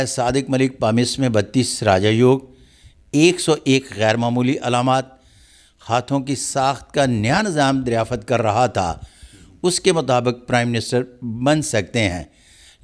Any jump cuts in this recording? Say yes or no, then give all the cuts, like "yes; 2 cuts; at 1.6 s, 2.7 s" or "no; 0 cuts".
no; 0 cuts